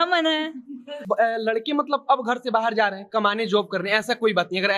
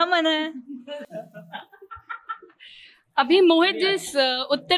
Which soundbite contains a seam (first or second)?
first